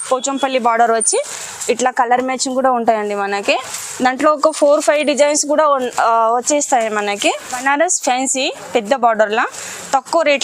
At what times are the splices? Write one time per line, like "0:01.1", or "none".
0:07.6

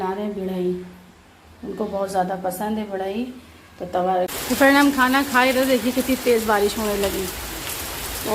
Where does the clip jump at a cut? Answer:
0:04.3

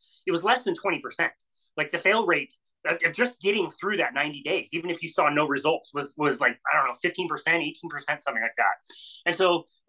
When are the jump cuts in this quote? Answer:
none

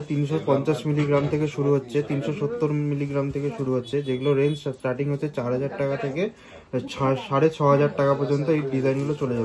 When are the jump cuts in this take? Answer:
none

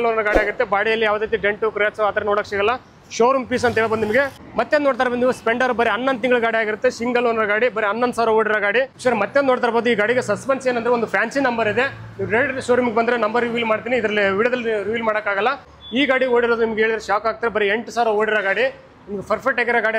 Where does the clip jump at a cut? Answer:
0:04.3
0:08.9
0:15.7

